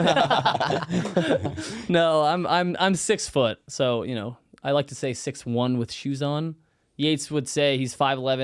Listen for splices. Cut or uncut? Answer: uncut